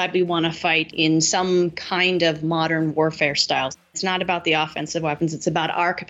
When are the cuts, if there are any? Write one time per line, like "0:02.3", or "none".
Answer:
0:00.9
0:03.8